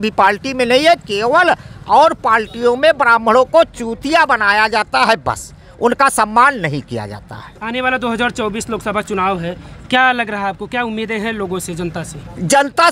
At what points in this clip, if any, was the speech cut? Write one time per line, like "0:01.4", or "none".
none